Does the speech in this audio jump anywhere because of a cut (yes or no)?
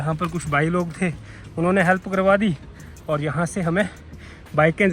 no